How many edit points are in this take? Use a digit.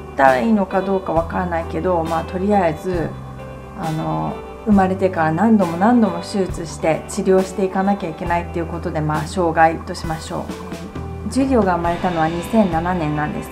1